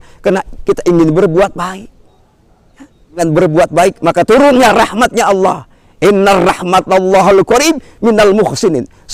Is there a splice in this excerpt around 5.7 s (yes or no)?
no